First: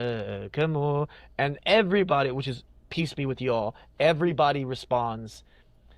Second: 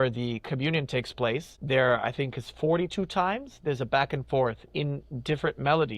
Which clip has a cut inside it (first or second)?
second